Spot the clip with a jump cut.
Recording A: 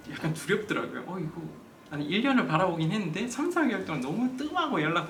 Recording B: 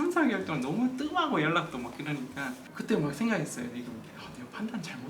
B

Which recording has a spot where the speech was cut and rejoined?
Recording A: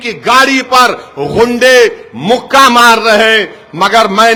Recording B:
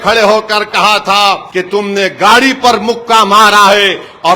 B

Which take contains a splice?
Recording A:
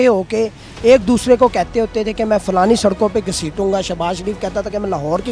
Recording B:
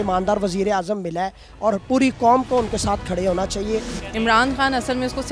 B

